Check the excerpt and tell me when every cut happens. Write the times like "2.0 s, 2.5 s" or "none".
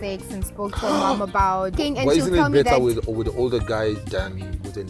1.7 s